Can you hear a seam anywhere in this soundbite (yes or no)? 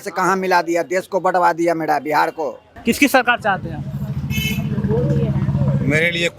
yes